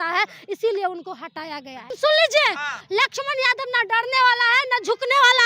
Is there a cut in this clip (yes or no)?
yes